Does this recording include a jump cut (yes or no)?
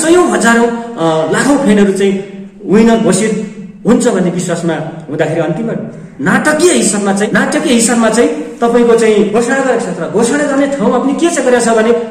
yes